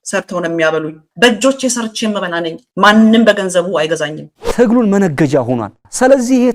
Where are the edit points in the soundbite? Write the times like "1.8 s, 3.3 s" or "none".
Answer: 4.3 s